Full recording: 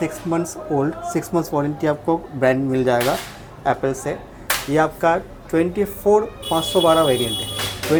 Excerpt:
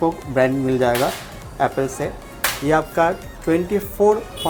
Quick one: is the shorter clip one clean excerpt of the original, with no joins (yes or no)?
yes